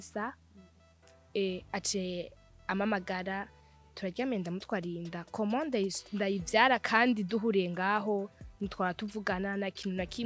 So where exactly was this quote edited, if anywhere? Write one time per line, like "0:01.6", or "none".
none